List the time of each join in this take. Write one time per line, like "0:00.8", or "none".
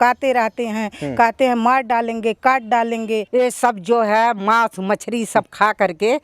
0:03.2